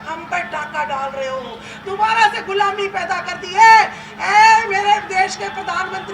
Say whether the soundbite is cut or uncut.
cut